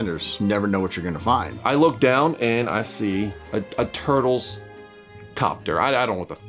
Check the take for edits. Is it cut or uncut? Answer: uncut